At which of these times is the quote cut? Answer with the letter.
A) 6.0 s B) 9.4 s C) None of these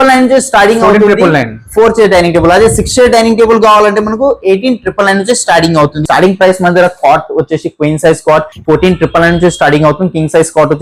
A